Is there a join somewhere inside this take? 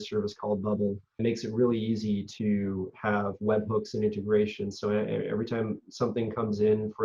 yes; 1 cut; at 1.2 s

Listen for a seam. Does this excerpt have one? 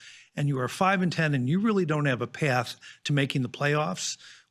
no; 0 cuts

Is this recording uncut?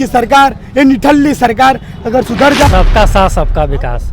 no; 1 cut; at 2.7 s

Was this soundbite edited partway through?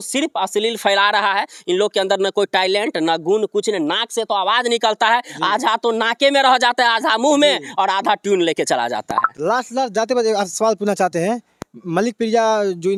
no; 0 cuts

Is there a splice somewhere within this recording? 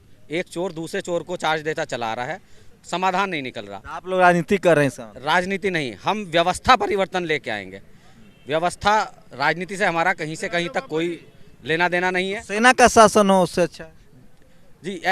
no; 0 cuts

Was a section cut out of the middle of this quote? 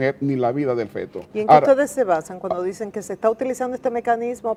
no; 0 cuts

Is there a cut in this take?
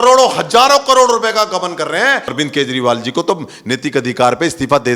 yes; 1 cut; at 2.3 s

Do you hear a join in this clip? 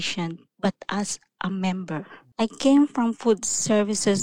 yes; 1 cut; at 2.2 s

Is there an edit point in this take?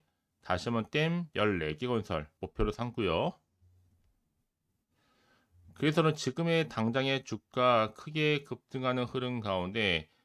yes; 1 cut; at 2.4 s

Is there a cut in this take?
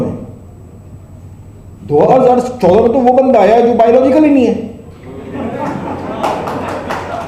no; 0 cuts

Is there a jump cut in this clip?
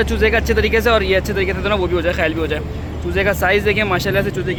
no; 0 cuts

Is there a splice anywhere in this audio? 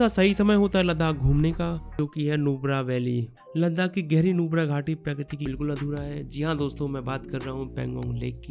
yes; 2 cuts; at 2.0 s, 5.4 s

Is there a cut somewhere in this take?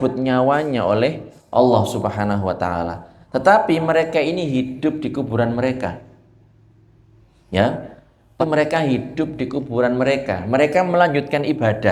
yes; 1 cut; at 8.4 s

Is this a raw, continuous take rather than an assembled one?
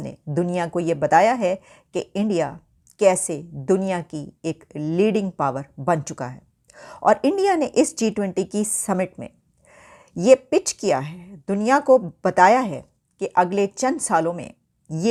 yes; 0 cuts

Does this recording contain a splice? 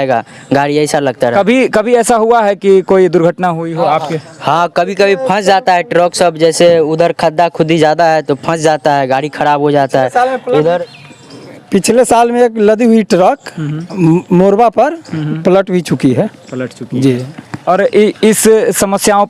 no; 0 cuts

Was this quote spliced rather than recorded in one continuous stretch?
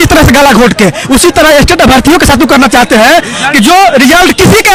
no; 0 cuts

